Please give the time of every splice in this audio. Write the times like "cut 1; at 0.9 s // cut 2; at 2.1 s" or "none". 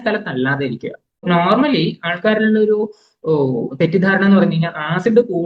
cut 1; at 1.2 s